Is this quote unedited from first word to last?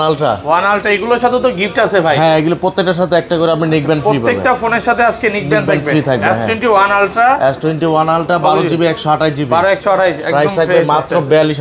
yes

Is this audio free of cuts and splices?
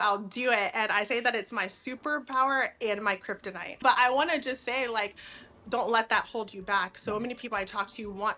no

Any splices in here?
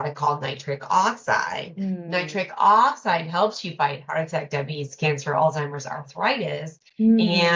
no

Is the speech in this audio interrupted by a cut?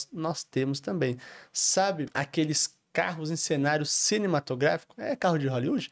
yes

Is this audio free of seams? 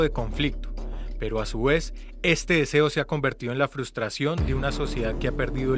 no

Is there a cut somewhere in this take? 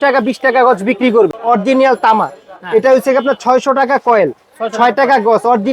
yes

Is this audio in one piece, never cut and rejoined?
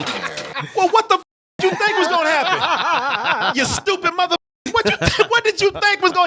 yes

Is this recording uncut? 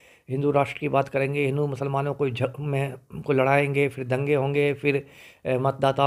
yes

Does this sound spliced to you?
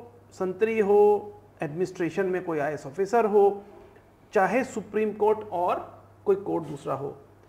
no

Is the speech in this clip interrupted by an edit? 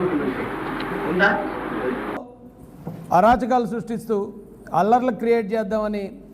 yes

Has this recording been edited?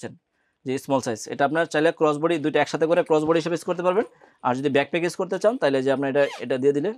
no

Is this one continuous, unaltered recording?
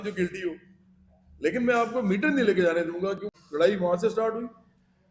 no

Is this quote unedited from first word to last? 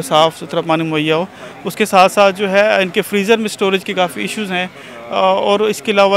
yes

